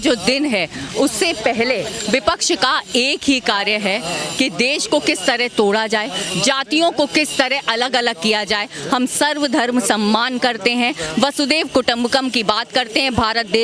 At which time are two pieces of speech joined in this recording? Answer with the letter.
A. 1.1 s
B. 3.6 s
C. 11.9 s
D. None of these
D